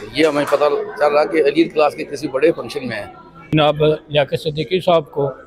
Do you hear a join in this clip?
yes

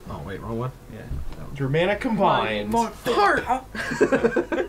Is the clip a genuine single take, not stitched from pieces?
yes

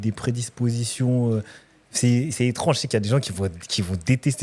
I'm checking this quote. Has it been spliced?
no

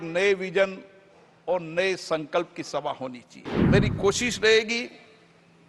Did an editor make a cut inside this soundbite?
yes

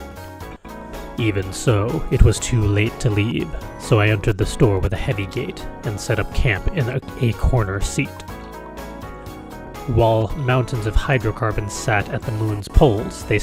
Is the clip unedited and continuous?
yes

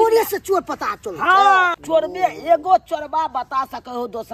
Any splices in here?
yes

